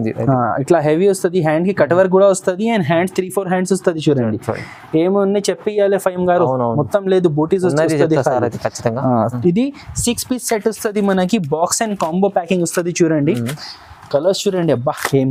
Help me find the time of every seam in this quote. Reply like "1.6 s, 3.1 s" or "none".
none